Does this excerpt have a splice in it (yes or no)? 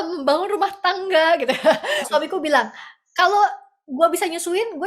yes